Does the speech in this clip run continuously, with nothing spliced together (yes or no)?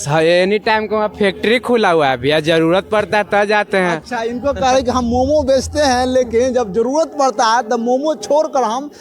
yes